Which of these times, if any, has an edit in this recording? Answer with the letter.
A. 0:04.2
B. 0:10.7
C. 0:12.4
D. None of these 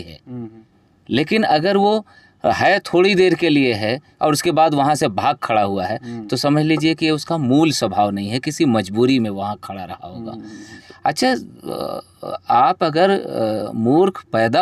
B